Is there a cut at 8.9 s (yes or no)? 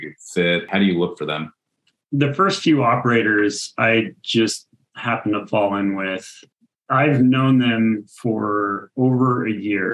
no